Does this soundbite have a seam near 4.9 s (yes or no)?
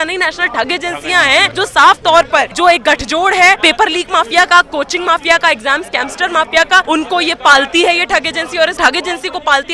no